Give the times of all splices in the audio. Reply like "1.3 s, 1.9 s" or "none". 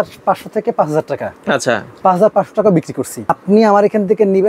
3.4 s